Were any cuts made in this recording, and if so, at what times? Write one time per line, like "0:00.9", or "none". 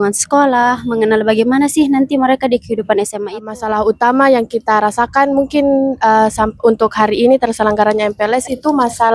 0:03.1